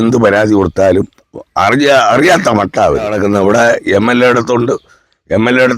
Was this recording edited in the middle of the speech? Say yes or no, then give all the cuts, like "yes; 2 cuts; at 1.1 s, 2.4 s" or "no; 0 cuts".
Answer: yes; 1 cut; at 3.1 s